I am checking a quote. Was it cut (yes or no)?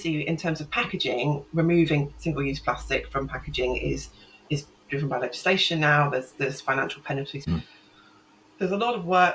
yes